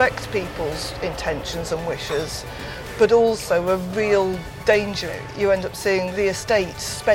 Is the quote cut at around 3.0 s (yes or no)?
no